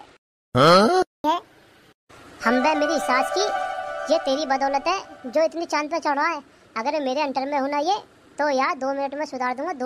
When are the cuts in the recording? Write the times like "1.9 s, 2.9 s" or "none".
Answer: 1.2 s